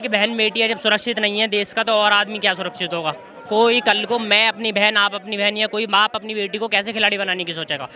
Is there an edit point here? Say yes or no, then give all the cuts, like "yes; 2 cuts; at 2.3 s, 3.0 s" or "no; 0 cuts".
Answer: no; 0 cuts